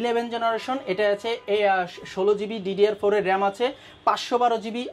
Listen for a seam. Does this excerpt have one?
no; 0 cuts

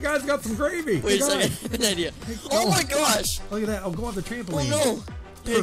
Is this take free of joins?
no; 1 cut; at 1.0 s

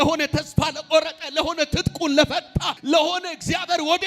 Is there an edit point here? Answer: yes; 1 cut; at 2.7 s

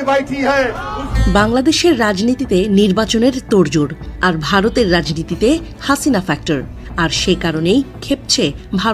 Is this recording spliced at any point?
yes; 2 cuts; at 1.1 s, 6.8 s

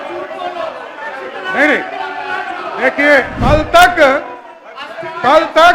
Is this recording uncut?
no; 1 cut; at 3.3 s

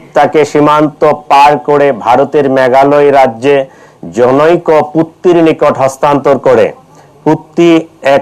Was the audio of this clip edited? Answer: no; 0 cuts

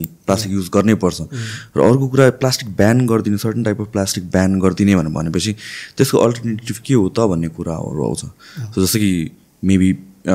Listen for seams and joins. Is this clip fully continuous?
yes; 0 cuts

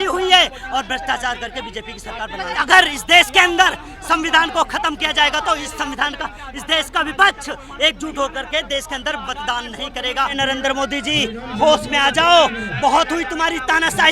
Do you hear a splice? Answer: yes; 2 cuts; at 2.6 s, 10.3 s

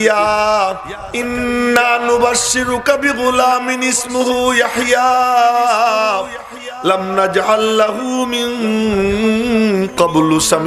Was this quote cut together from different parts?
no; 0 cuts

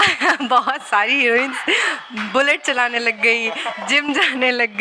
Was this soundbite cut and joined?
no; 0 cuts

